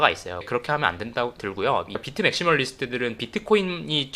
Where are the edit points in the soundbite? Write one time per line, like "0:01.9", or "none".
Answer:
0:01.9